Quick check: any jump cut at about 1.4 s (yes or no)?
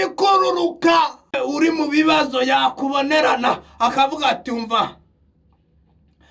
yes